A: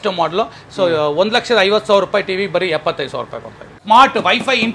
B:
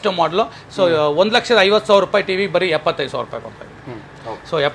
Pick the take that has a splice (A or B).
A